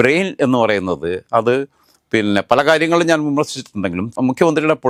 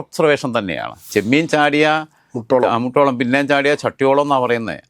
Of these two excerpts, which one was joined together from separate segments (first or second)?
second